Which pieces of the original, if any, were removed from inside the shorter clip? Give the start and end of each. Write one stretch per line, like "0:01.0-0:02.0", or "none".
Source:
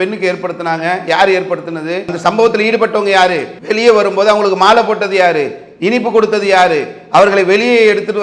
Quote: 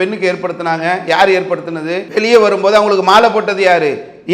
0:02.0-0:03.5